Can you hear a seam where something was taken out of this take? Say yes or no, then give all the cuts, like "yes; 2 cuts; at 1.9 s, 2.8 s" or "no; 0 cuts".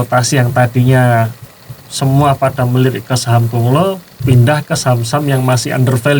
no; 0 cuts